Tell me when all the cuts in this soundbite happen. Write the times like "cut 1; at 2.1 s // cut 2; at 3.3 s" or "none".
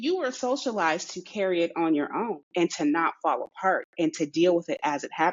none